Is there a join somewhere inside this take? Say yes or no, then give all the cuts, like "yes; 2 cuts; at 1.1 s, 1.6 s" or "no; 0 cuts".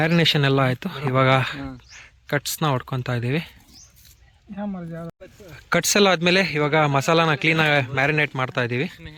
no; 0 cuts